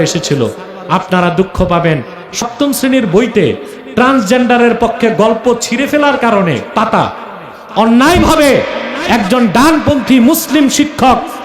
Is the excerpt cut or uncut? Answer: cut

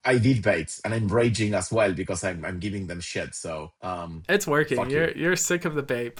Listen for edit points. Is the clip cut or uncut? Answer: uncut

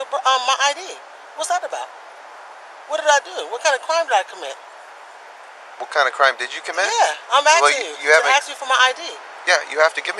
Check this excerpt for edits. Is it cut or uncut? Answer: uncut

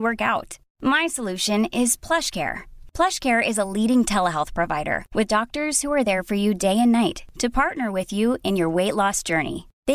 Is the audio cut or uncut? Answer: uncut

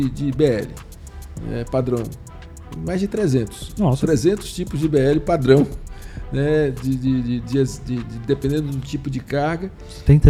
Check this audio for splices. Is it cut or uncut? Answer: uncut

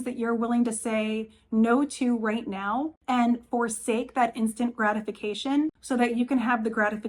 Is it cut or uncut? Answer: cut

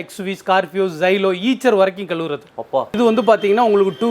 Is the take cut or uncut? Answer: cut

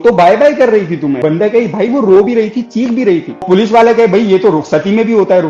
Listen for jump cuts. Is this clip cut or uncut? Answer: cut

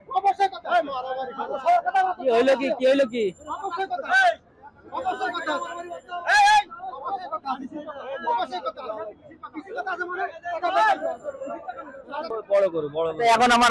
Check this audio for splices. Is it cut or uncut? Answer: cut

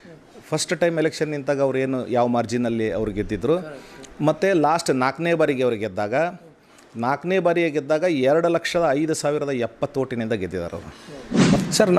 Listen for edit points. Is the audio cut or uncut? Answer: cut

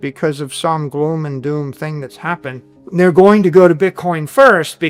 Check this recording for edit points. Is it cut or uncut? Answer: uncut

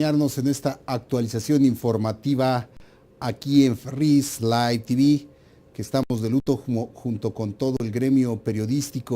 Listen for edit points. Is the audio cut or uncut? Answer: cut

